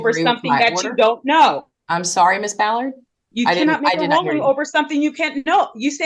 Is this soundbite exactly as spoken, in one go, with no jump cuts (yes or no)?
yes